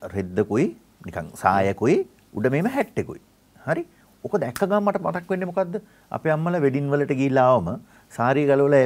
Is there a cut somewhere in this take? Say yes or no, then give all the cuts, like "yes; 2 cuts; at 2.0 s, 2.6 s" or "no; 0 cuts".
no; 0 cuts